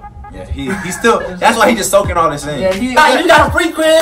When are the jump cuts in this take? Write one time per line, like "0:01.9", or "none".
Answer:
0:03.0